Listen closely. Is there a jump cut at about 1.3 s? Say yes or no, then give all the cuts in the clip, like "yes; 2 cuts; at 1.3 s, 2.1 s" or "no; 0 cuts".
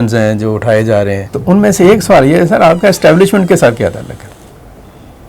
yes; 1 cut; at 1.3 s